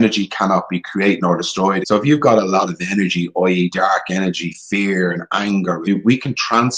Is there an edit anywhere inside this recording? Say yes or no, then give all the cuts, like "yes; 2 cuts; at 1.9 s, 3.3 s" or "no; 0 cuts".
yes; 2 cuts; at 1.8 s, 5.9 s